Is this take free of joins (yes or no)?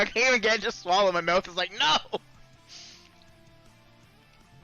no